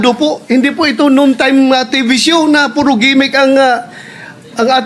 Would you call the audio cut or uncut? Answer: uncut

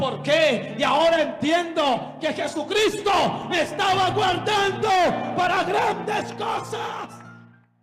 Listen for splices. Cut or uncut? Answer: uncut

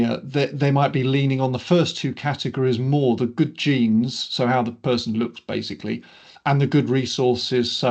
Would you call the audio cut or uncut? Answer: uncut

